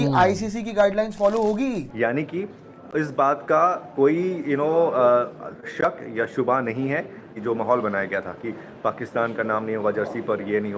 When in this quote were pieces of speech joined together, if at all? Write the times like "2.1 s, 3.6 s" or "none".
1.9 s, 7.3 s

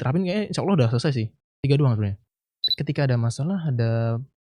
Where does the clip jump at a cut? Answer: 2.7 s

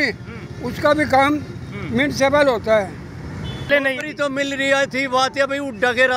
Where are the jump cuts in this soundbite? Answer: 3.7 s

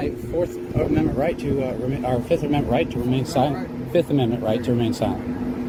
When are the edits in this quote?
none

